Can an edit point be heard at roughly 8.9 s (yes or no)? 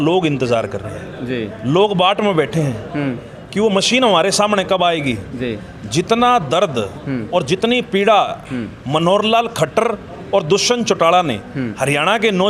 no